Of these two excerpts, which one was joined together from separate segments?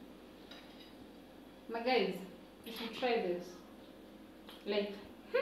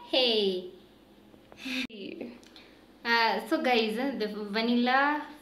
second; 1 cut; at 1.9 s

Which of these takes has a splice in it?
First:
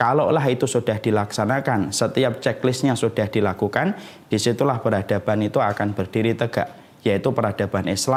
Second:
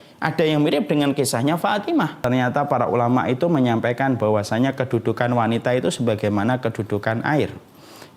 second; 1 cut; at 2.2 s

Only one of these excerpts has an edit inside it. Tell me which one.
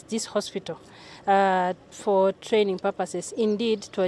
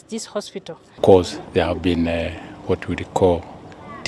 second; 1 cut; at 0.9 s

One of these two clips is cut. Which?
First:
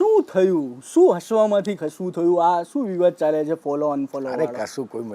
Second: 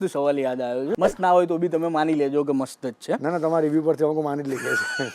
second; 1 cut; at 1.0 s

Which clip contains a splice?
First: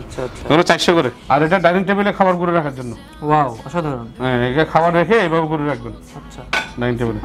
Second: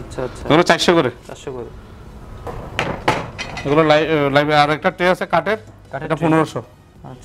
first; 1 cut; at 1.2 s

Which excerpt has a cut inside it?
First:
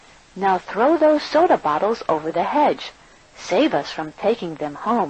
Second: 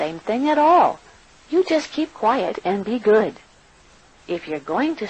second; 1 cut; at 3.3 s

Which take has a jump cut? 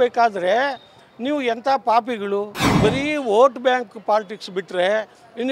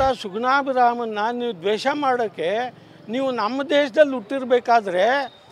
first; 1 cut; at 2.6 s

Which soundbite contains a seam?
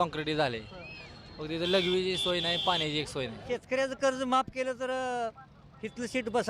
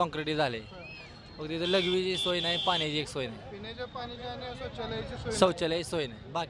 first; 1 cut; at 3.4 s

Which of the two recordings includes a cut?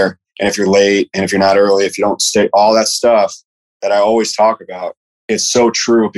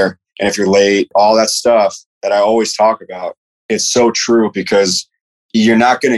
second; 2 cuts; at 1.1 s, 2.1 s

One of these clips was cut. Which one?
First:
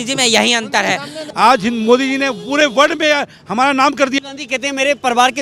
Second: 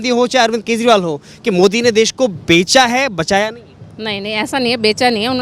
first; 2 cuts; at 1.2 s, 4.2 s

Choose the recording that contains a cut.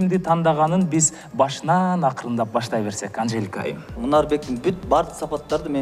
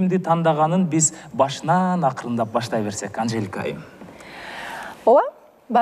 first; 1 cut; at 4.0 s

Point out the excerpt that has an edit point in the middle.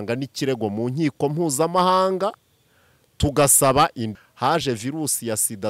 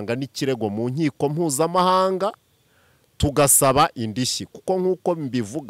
first; 1 cut; at 4.0 s

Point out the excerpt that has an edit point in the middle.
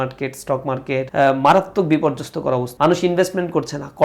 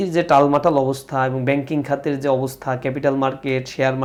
first; 2 cuts; at 1.1 s, 2.7 s

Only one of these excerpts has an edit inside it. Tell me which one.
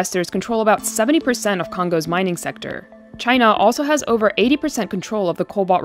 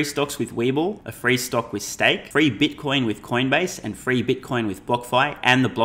second; 2 cuts; at 1.1 s, 2.2 s

